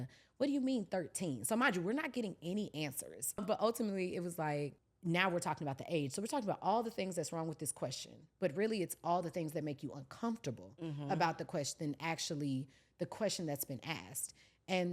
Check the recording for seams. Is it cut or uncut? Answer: cut